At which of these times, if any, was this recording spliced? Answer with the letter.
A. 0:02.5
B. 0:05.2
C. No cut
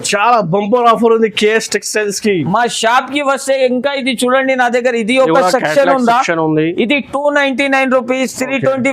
A